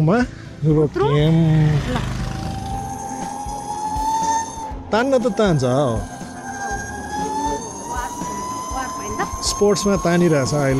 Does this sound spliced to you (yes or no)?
yes